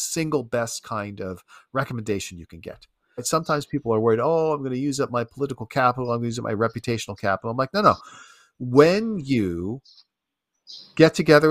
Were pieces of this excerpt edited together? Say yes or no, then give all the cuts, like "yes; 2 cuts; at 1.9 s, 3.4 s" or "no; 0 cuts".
yes; 1 cut; at 3.2 s